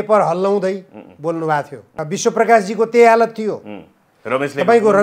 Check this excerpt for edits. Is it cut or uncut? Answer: cut